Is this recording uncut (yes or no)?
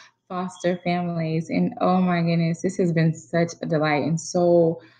yes